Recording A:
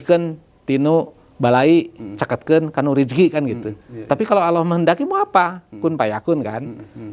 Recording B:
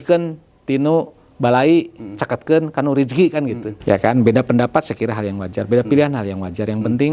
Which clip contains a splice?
B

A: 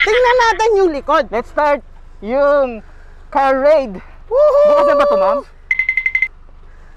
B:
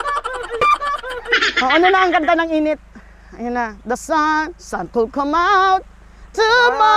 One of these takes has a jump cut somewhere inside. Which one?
B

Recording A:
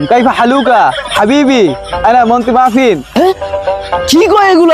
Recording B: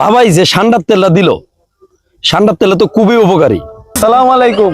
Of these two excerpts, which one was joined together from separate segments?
B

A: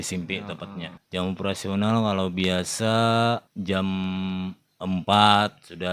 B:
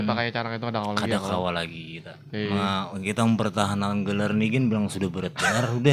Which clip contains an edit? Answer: A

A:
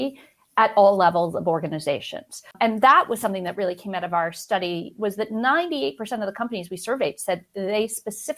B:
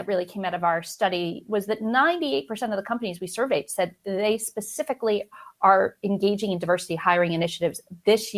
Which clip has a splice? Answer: A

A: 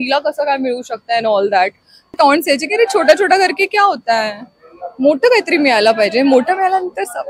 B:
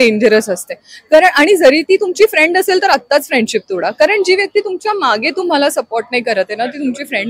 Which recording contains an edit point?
A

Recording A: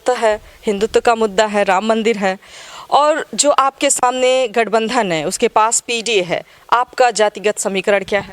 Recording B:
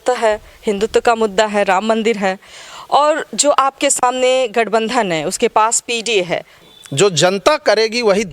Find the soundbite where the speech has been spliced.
B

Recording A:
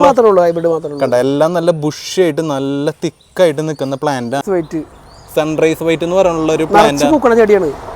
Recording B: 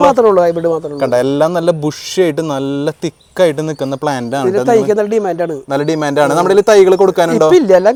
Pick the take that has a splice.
A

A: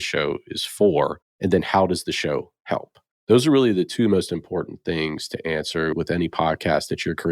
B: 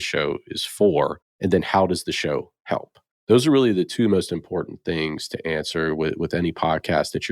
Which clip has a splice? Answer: A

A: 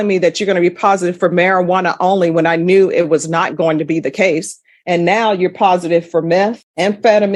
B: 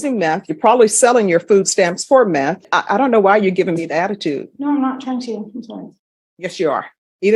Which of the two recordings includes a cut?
B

